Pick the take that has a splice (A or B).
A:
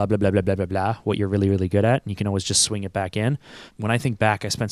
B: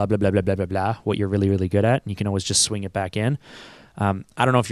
A